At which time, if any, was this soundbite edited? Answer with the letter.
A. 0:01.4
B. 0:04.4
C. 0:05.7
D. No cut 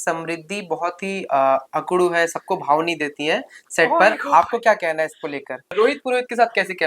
C